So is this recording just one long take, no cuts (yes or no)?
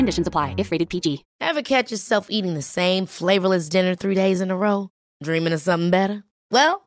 no